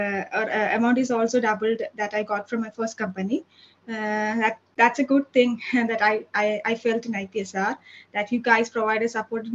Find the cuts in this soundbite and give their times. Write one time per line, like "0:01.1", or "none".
none